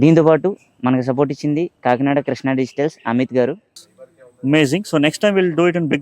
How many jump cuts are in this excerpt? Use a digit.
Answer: 1